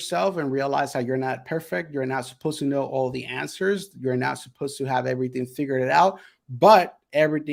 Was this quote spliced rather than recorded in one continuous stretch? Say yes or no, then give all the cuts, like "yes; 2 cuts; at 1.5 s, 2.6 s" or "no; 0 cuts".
no; 0 cuts